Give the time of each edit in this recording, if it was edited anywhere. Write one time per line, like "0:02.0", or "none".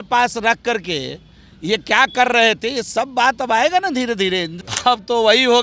0:04.5